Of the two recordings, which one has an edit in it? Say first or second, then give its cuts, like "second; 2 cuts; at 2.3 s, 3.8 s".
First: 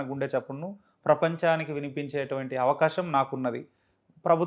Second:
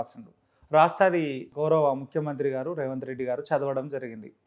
second; 1 cut; at 1.5 s